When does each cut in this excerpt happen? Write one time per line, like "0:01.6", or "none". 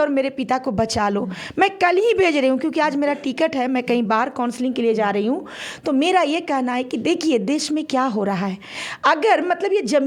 none